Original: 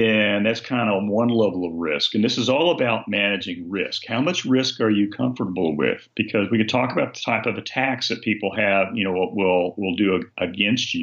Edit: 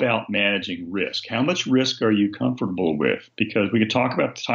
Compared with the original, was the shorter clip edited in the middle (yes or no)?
no